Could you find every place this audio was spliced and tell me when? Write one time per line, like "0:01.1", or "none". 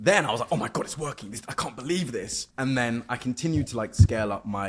0:02.4